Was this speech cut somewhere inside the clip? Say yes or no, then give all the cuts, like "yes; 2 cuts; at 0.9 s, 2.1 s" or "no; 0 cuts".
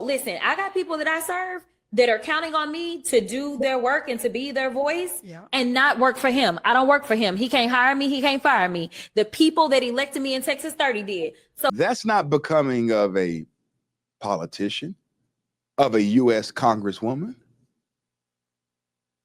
yes; 1 cut; at 11.7 s